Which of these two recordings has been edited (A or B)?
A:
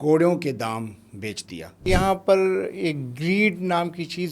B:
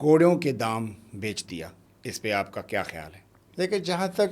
A